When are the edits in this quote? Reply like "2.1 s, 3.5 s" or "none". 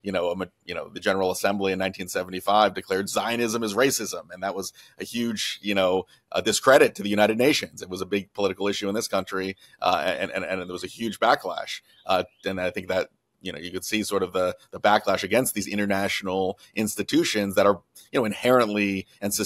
none